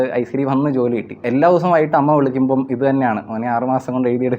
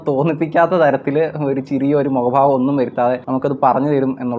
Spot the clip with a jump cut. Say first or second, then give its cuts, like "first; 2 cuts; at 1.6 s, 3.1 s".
first; 1 cut; at 1.2 s